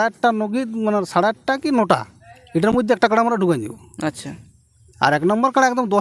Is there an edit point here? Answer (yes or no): no